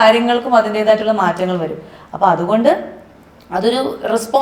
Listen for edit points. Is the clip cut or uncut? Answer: uncut